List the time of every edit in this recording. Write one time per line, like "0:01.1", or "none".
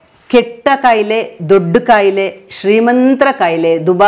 none